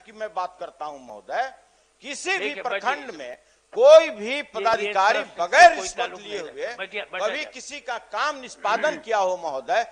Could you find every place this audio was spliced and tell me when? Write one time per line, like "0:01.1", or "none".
none